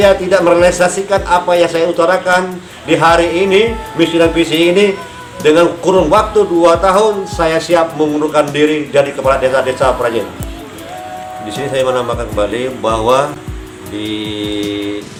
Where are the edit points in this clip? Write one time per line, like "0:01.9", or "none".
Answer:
none